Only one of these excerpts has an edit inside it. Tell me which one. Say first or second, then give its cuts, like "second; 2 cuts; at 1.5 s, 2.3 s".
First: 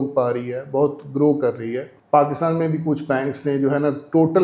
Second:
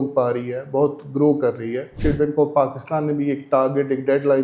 second; 1 cut; at 1.9 s